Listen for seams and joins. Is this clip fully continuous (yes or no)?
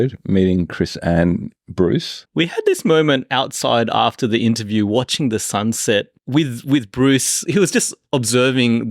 no